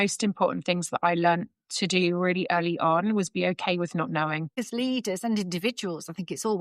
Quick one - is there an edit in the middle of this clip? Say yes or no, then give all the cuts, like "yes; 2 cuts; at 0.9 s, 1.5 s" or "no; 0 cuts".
yes; 1 cut; at 4.6 s